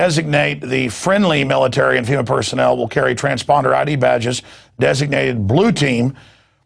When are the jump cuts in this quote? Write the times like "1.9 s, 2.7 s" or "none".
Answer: 1.5 s